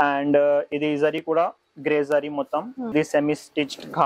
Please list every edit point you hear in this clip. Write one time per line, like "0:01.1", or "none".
0:02.9